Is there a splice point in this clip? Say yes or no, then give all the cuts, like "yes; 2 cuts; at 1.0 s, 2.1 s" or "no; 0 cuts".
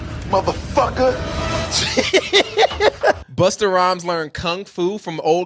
yes; 1 cut; at 3.2 s